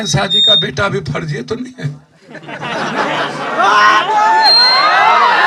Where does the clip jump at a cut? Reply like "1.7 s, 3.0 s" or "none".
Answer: none